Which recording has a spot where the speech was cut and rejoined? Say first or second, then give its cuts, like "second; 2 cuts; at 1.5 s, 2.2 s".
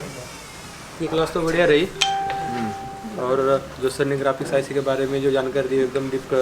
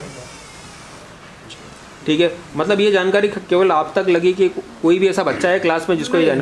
first; 1 cut; at 1.0 s